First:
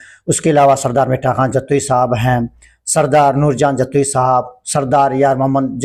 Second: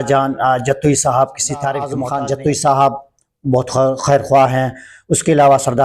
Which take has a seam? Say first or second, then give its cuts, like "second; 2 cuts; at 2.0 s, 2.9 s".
second; 1 cut; at 2.0 s